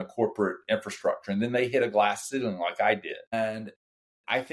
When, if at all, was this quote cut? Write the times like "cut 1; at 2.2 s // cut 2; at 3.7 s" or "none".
cut 1; at 3.3 s